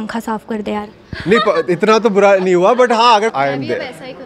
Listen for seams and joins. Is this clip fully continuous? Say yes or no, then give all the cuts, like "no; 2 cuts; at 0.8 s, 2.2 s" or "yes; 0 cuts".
no; 1 cut; at 3.3 s